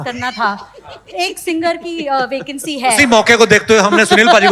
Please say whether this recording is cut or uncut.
uncut